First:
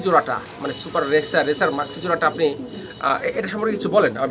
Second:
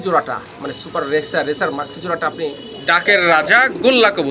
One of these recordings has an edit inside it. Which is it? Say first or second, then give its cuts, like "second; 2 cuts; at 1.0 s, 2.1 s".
second; 1 cut; at 2.7 s